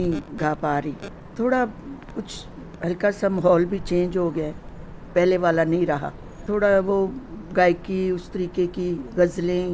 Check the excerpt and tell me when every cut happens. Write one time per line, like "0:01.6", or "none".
0:01.3
0:06.4

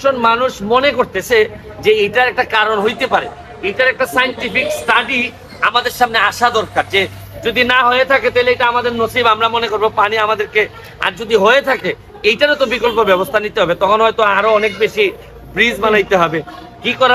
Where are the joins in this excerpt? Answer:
none

